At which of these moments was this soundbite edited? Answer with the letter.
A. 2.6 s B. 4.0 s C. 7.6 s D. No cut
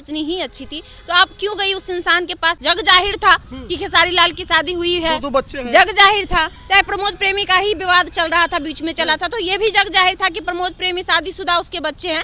A